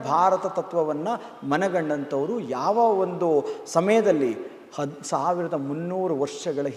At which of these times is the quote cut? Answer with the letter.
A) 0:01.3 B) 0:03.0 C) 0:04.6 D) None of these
D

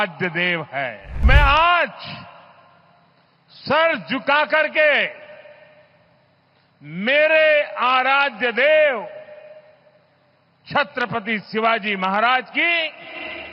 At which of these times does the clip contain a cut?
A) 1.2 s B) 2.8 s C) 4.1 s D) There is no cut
A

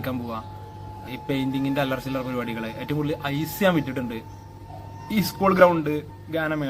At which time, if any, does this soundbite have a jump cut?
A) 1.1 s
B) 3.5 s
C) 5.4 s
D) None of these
A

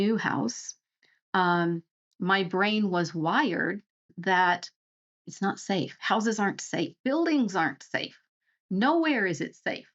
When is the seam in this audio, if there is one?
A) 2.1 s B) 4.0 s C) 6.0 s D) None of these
B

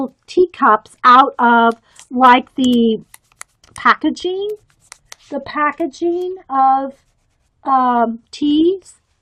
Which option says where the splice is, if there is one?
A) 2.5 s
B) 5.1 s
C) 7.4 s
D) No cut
D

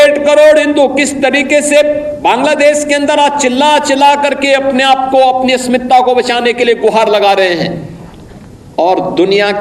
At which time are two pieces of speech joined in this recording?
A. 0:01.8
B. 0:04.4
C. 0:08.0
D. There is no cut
D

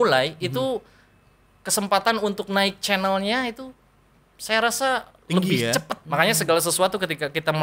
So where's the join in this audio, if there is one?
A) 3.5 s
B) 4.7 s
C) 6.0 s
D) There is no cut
C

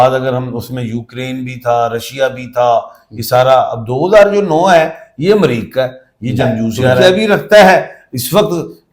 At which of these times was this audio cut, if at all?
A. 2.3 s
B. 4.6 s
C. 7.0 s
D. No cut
C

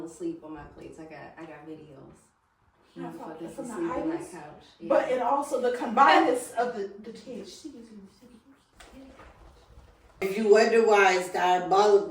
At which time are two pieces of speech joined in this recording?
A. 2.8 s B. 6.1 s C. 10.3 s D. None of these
C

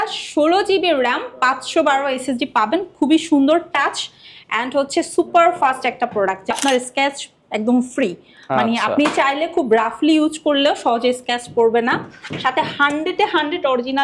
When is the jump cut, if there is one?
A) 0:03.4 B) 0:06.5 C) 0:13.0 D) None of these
B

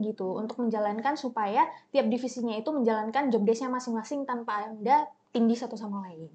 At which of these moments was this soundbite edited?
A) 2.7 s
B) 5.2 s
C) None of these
B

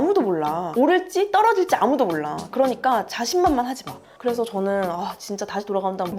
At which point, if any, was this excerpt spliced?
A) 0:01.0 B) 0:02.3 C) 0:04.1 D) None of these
C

